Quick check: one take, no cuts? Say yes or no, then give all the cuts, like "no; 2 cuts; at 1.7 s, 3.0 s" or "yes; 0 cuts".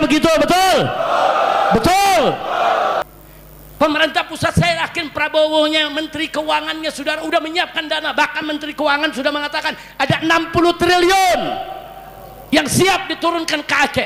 no; 1 cut; at 3.0 s